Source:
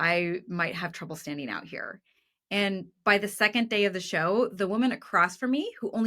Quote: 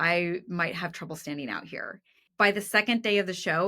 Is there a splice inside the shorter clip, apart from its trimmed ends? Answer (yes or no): yes